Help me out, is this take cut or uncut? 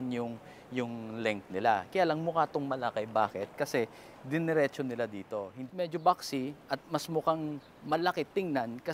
cut